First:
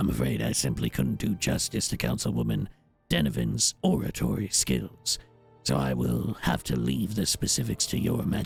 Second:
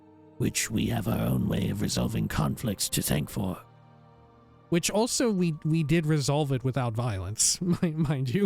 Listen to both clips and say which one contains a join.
second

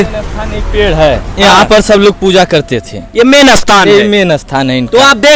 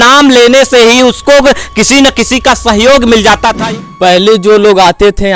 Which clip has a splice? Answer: second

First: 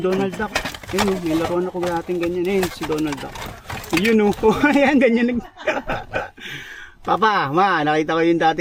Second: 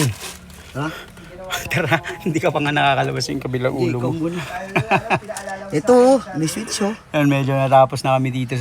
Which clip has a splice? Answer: second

